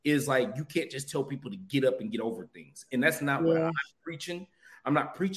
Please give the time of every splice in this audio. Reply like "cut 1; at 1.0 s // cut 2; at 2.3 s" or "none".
none